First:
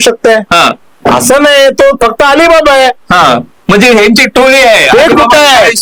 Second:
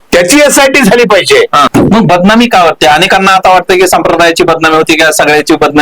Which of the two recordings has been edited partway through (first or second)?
second